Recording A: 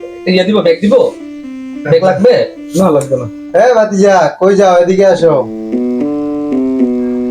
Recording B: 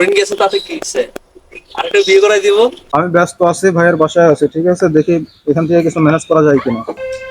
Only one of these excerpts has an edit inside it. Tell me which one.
B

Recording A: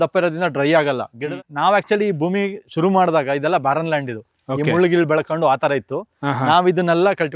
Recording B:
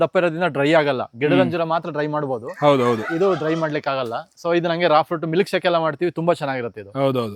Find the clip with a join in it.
A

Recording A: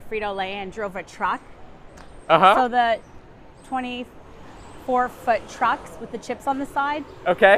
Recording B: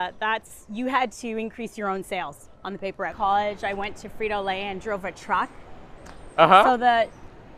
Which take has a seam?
B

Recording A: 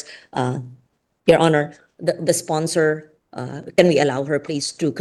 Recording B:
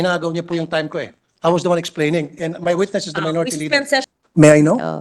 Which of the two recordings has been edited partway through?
B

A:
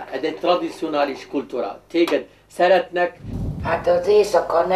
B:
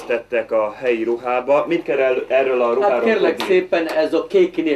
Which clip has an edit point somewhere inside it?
A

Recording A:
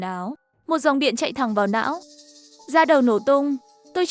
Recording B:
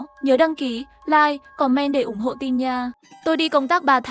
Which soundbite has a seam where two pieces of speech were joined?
B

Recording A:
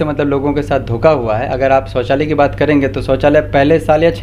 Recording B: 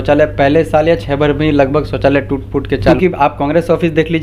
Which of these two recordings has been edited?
B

